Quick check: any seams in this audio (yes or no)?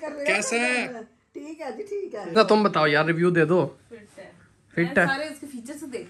yes